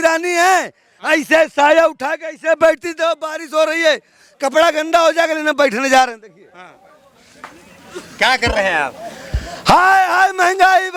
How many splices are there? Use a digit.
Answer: 0